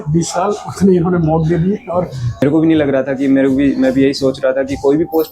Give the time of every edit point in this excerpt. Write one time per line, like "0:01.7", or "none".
0:02.4